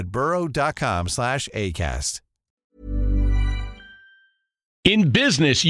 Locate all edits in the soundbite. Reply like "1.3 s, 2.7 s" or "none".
4.8 s

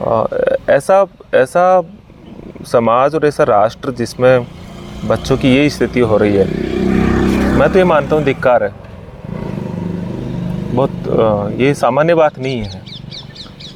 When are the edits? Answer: none

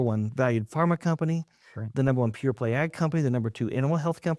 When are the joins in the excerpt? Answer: none

